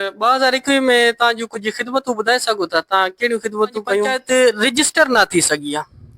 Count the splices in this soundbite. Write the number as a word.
one